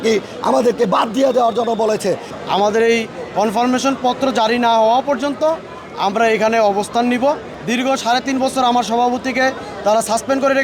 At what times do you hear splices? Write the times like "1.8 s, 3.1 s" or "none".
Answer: 2.3 s, 7.5 s